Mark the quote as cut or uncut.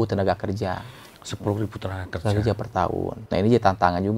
cut